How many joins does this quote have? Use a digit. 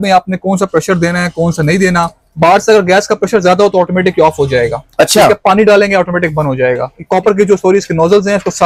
2